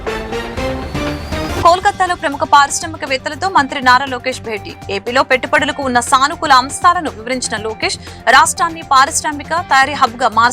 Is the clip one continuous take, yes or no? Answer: no